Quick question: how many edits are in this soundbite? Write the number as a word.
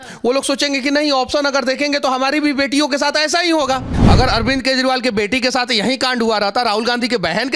one